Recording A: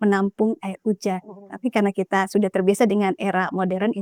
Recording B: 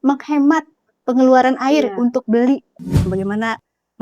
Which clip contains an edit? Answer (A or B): B